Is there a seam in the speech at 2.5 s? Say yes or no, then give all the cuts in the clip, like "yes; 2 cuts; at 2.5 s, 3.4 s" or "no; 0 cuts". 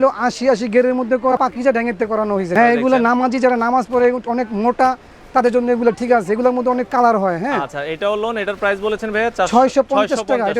yes; 2 cuts; at 1.3 s, 2.5 s